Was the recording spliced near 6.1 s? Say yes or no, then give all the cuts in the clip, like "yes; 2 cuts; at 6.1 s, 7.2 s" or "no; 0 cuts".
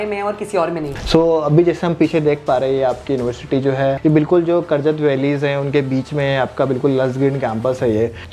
no; 2 cuts; at 0.9 s, 4.0 s